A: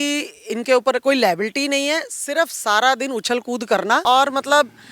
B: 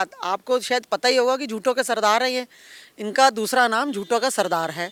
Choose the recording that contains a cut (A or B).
A